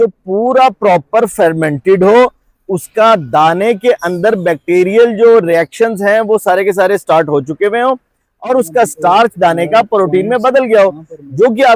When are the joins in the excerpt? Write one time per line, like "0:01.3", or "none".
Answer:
none